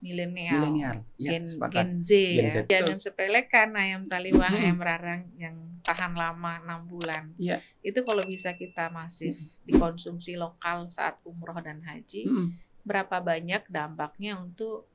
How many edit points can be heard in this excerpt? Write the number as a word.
one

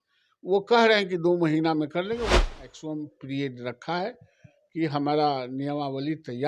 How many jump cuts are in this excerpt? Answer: one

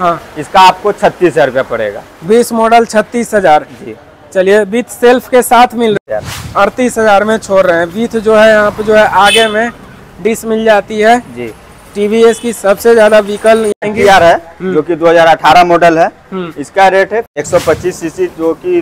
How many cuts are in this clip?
three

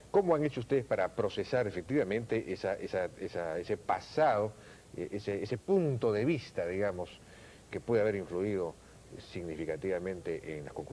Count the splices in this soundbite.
one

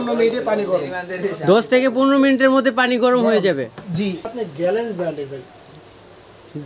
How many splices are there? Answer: one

